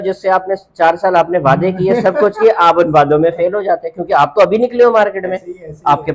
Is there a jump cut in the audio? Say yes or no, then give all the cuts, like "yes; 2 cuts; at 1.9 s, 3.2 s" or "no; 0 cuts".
no; 0 cuts